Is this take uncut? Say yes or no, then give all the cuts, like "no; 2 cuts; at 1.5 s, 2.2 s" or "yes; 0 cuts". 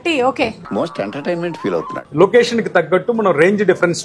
no; 1 cut; at 1.9 s